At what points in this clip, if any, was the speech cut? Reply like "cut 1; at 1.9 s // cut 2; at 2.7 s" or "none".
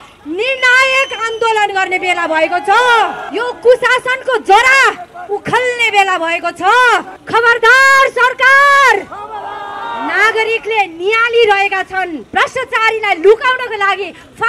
cut 1; at 3.2 s // cut 2; at 7.2 s // cut 3; at 12.2 s